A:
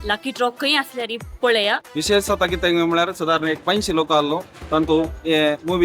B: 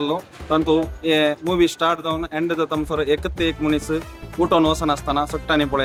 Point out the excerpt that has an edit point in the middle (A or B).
A